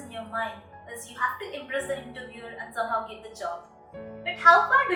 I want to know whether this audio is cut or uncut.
uncut